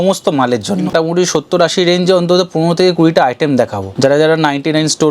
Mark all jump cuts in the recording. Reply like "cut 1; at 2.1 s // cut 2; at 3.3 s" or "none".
cut 1; at 0.9 s // cut 2; at 3.8 s

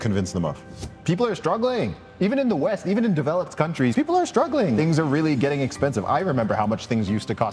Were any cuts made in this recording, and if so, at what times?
cut 1; at 1.0 s // cut 2; at 3.9 s // cut 3; at 4.8 s

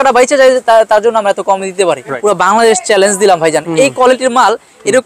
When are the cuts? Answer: cut 1; at 2.1 s

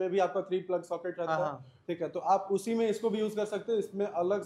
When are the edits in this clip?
none

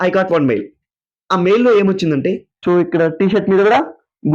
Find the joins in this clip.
cut 1; at 2.5 s

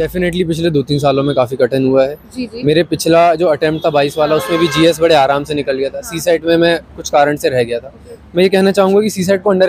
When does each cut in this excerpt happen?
none

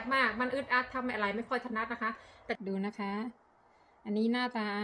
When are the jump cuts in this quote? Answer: cut 1; at 2.6 s

